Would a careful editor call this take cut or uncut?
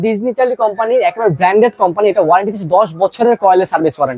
uncut